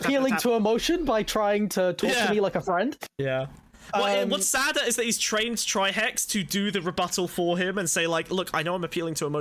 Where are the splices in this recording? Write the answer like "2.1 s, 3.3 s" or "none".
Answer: none